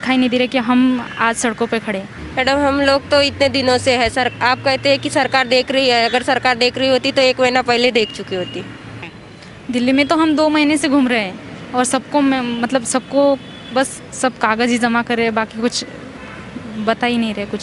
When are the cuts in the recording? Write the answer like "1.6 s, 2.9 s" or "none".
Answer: 2.2 s, 9.0 s